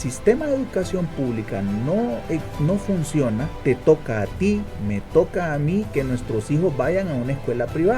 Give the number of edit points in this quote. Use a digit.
1